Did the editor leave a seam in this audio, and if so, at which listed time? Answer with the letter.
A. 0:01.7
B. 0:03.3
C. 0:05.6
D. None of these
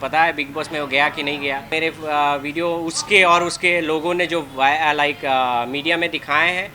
A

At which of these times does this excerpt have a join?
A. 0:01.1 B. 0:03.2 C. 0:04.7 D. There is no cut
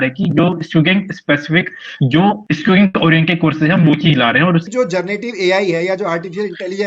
C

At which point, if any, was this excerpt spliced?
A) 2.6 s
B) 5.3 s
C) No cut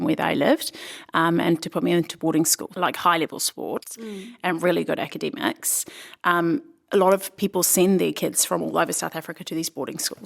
A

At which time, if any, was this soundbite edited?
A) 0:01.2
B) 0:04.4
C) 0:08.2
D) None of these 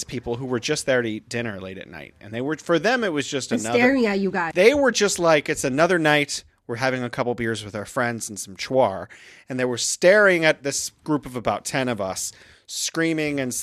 B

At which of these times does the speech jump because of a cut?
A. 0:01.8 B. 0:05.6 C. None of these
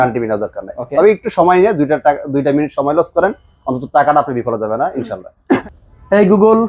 B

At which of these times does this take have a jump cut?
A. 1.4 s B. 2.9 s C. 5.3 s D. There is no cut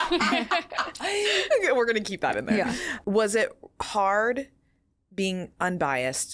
B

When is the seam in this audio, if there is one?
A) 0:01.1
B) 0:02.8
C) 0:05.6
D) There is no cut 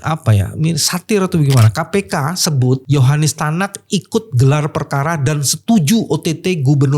B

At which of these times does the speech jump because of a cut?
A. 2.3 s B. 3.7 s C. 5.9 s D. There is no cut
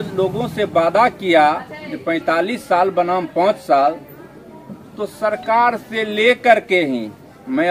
D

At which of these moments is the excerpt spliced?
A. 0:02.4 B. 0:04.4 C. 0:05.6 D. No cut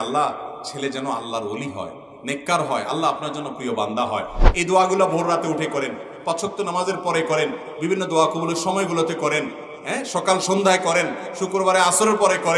B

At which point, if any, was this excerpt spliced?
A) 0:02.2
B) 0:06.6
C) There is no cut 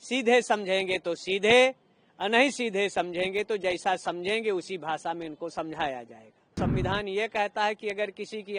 B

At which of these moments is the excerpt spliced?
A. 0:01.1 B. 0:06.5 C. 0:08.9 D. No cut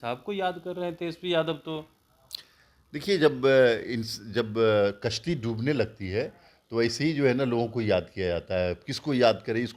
D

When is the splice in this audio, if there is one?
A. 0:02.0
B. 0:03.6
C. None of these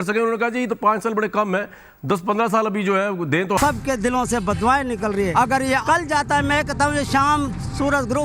B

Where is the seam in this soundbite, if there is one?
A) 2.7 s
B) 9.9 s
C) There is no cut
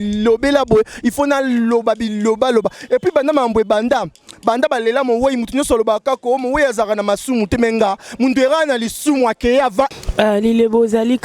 B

